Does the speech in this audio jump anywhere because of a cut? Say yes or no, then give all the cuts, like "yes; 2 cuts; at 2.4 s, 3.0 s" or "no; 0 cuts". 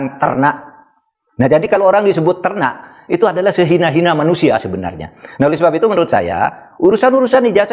no; 0 cuts